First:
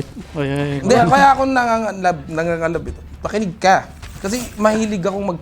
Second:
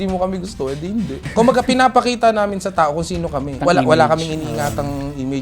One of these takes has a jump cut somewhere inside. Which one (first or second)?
second